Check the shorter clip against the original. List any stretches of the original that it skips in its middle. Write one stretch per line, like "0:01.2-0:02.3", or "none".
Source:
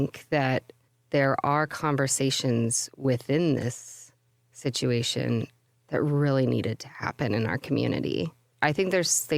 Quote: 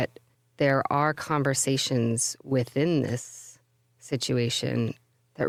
none